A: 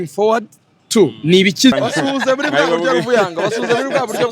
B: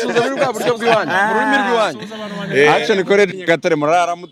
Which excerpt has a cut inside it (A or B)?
A